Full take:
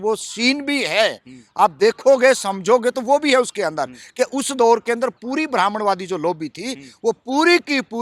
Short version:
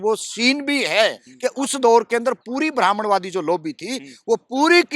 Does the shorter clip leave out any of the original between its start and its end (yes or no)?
yes